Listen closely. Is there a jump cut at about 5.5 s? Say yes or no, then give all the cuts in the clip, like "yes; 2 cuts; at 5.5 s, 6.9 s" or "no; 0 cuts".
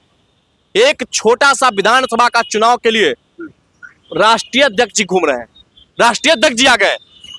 no; 0 cuts